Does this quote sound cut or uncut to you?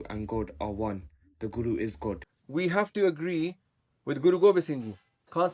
cut